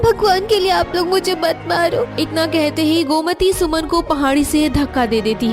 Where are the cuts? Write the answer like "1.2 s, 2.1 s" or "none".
2.1 s